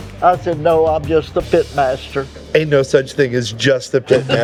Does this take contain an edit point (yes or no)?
no